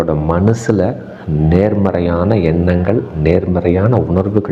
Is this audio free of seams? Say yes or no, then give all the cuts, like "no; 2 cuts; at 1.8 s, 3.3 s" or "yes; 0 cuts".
yes; 0 cuts